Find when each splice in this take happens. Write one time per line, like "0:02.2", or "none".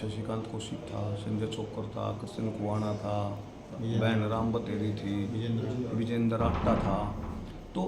none

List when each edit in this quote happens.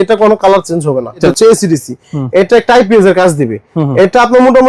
0:01.3

